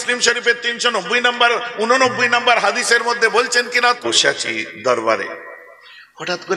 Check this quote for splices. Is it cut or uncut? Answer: cut